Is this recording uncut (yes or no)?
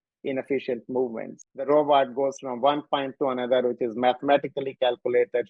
no